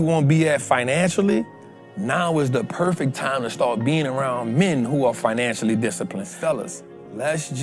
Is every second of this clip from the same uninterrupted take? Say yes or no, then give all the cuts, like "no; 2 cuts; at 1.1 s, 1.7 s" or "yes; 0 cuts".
no; 1 cut; at 6.3 s